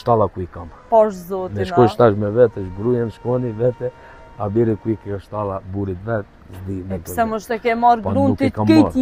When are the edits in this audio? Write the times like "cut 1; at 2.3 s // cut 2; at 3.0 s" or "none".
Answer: none

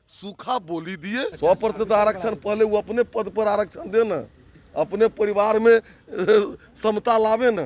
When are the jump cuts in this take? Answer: cut 1; at 1.3 s

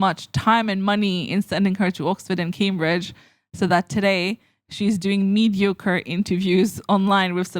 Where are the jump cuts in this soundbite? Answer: none

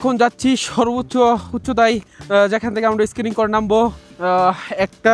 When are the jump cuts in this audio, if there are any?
cut 1; at 2.1 s // cut 2; at 4.1 s

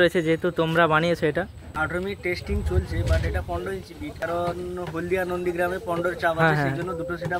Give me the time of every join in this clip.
cut 1; at 1.7 s // cut 2; at 4.2 s

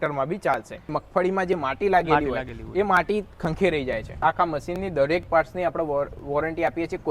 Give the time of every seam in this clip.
cut 1; at 1.0 s // cut 2; at 4.2 s

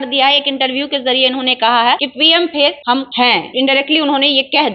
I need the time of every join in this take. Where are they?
cut 1; at 2.1 s // cut 2; at 3.2 s

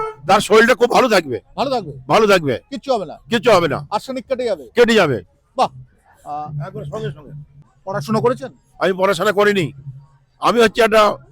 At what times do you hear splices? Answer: cut 1; at 7.5 s

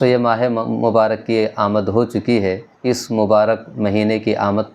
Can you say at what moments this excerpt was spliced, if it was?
cut 1; at 2.7 s

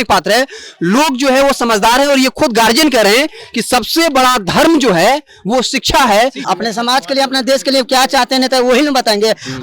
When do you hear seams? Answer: cut 1; at 6.4 s

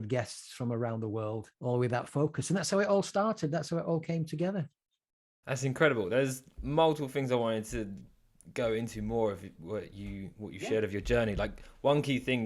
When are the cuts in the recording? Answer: none

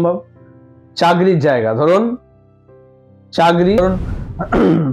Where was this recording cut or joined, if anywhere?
cut 1; at 3.8 s

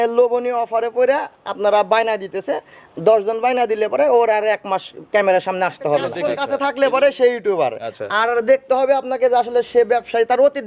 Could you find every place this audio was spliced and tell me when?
cut 1; at 6.3 s

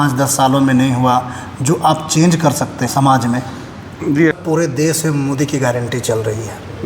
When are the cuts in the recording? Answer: cut 1; at 4.3 s

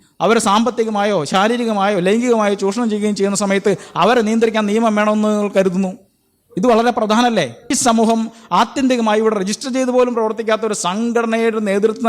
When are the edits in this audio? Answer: cut 1; at 7.8 s

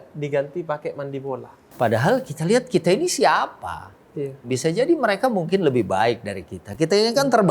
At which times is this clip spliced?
cut 1; at 1.6 s // cut 2; at 4.5 s

